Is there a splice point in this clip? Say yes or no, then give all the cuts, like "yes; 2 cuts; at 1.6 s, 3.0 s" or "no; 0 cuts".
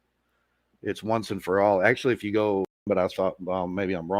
yes; 1 cut; at 2.9 s